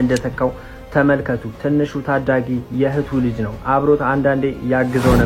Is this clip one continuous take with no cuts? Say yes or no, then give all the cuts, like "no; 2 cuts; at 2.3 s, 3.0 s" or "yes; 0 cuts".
yes; 0 cuts